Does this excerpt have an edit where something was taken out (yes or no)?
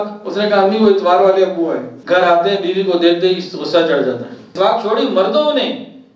yes